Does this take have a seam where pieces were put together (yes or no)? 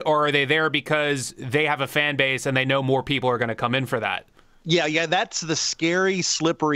no